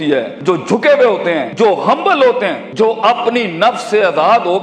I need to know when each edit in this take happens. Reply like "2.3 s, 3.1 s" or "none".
none